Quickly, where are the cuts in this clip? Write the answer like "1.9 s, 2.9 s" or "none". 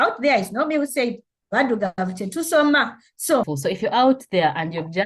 3.5 s